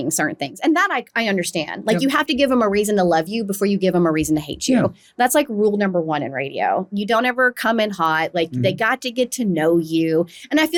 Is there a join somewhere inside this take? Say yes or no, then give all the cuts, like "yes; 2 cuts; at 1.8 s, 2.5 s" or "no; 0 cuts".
no; 0 cuts